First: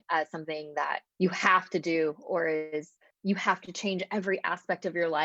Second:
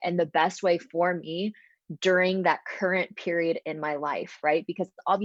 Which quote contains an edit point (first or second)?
first